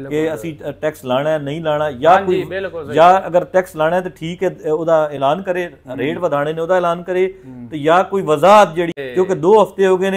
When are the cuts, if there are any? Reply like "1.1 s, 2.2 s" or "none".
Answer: 8.9 s